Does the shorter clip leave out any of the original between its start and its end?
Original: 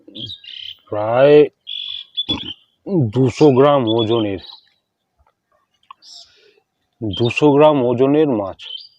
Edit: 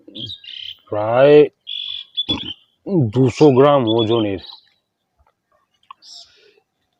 no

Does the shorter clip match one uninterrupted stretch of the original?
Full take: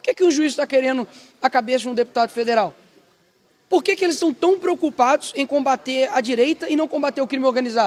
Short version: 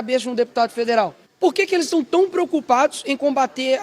no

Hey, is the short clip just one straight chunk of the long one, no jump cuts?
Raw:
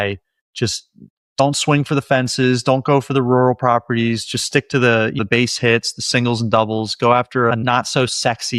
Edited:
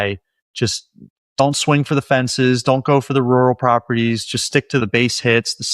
no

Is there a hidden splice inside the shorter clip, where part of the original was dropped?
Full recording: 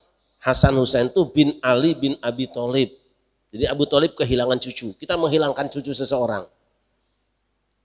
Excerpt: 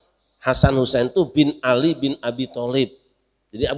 no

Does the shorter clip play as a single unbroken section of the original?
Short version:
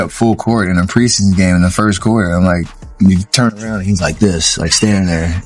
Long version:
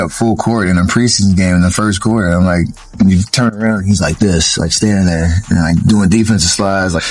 yes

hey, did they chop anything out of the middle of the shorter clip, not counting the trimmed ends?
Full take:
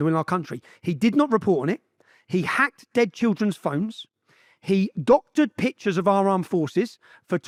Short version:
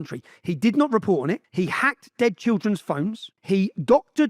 yes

